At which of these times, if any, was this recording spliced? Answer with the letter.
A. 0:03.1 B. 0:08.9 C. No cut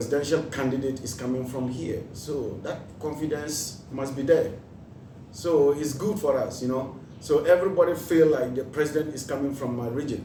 C